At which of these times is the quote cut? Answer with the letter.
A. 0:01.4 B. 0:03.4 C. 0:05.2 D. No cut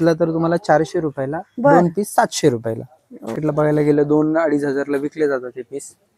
B